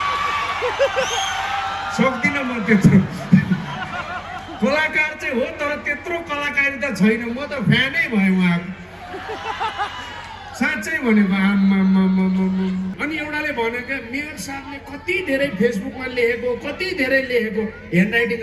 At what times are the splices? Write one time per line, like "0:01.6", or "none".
0:12.9